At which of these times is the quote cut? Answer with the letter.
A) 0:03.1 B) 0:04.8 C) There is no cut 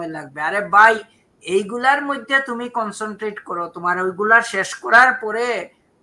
C